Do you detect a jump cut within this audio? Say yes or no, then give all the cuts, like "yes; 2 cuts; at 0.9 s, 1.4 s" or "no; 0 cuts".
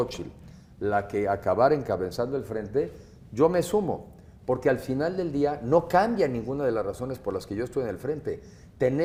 no; 0 cuts